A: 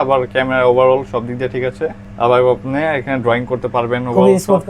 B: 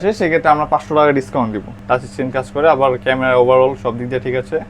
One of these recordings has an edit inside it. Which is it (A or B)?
B